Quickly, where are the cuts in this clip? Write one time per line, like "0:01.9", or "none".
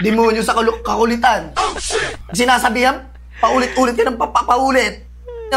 0:02.2